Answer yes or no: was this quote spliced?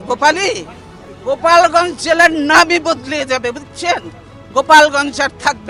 no